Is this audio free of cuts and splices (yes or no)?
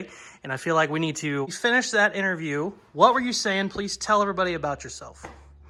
yes